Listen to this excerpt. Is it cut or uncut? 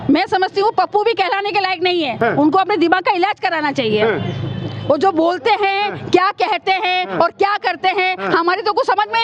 uncut